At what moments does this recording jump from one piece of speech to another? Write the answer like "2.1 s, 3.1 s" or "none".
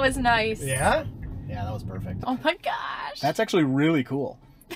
2.3 s

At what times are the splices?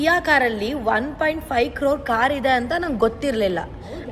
none

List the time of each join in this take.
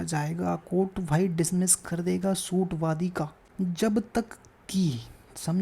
3.4 s

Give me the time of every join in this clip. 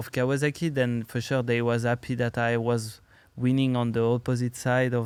none

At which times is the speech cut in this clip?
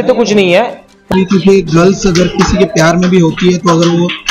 1.1 s

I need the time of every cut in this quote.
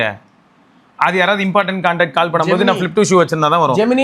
none

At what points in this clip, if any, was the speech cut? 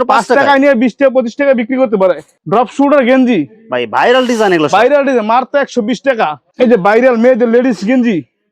2.3 s, 6.5 s

